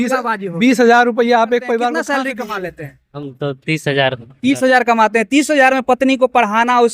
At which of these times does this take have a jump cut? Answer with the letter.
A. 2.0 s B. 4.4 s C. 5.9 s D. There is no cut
A